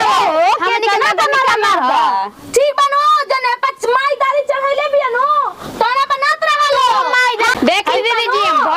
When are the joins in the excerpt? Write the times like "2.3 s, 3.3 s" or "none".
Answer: 7.6 s